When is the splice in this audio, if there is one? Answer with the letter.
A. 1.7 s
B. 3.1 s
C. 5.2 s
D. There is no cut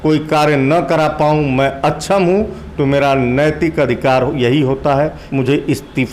C